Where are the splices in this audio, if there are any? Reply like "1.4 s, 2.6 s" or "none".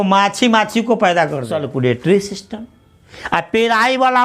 1.6 s